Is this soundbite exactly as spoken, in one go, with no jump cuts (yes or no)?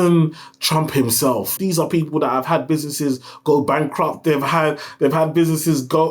no